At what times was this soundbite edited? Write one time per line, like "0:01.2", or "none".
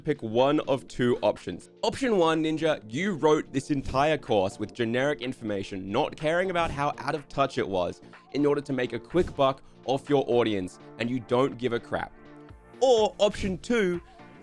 0:01.6